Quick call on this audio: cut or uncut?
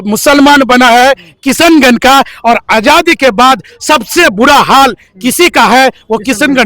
uncut